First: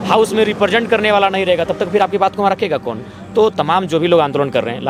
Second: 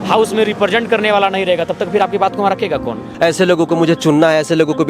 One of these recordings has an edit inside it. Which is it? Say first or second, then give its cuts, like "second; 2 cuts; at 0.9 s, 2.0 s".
second; 1 cut; at 3.0 s